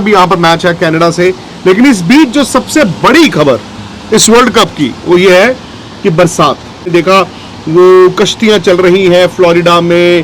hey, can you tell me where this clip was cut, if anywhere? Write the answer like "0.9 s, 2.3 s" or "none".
6.8 s